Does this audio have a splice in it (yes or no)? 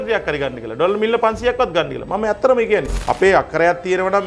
yes